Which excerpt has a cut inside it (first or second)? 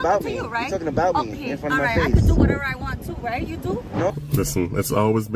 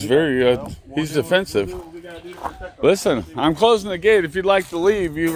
first